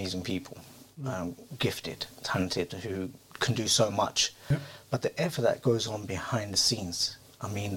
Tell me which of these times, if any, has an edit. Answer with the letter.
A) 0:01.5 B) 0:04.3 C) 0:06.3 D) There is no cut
B